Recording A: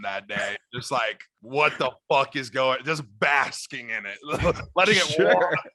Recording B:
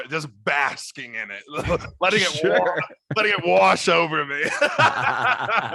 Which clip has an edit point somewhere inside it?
A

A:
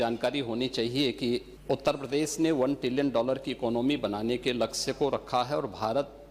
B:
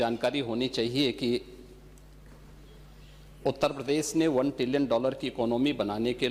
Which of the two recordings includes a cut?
A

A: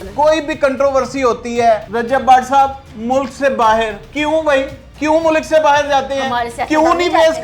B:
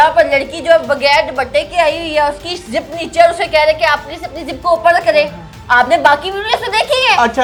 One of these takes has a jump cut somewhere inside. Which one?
A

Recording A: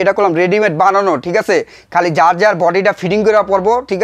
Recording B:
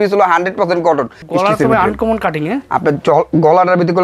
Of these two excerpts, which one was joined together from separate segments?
B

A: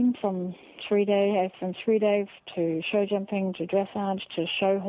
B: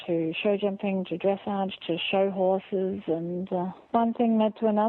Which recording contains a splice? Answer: B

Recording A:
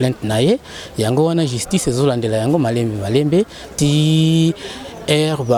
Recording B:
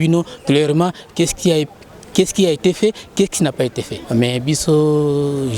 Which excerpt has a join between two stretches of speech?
B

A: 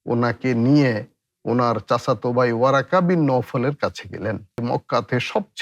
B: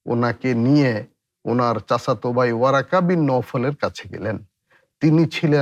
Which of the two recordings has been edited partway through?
A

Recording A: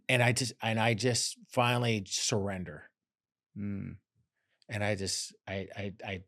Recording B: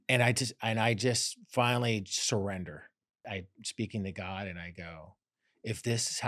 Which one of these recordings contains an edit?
B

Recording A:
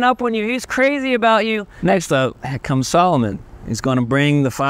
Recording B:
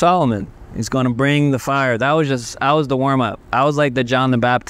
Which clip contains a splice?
A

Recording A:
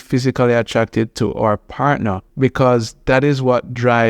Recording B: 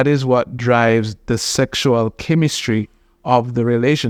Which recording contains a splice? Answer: A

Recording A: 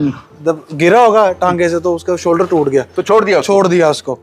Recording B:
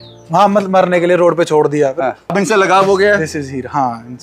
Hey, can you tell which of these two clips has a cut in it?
B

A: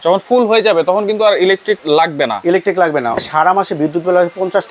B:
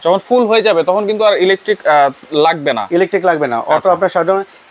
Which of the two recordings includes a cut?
A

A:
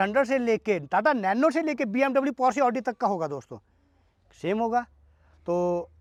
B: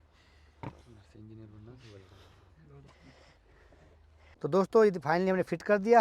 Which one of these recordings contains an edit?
B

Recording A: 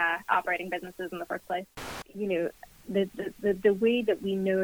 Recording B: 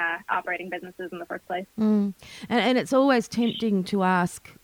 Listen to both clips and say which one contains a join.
A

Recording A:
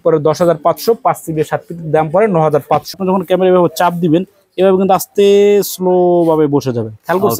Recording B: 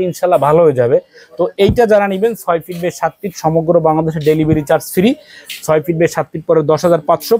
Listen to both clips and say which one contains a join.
A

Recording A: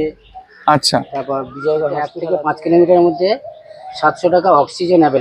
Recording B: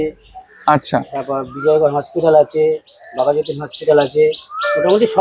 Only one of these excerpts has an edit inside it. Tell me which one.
A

